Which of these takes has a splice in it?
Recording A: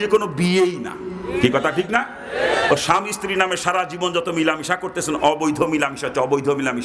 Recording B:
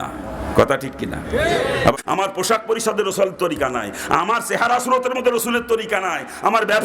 B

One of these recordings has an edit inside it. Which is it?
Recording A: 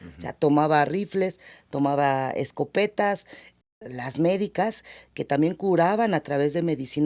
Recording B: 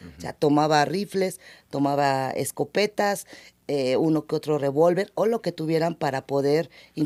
A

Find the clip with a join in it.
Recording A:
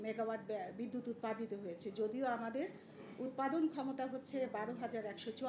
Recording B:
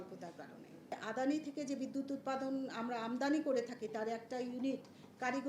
B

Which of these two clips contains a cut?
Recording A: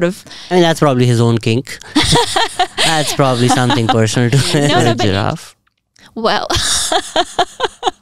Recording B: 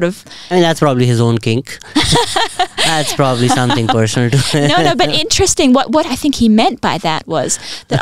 A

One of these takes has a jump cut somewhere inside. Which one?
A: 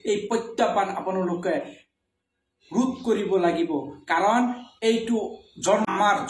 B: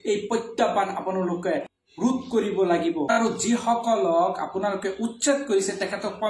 B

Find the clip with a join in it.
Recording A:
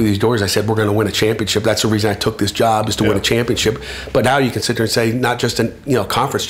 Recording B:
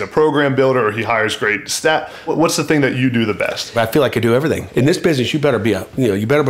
B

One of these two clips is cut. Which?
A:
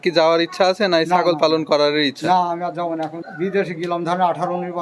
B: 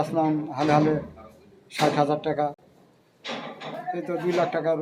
A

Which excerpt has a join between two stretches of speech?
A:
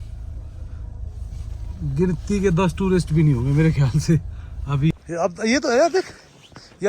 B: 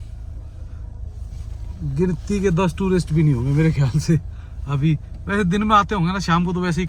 A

